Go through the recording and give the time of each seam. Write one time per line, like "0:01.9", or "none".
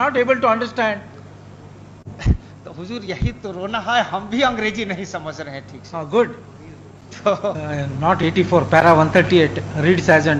none